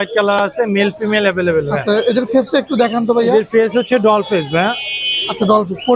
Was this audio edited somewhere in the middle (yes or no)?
no